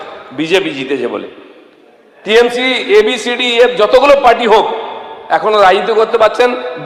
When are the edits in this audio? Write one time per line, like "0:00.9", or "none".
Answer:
none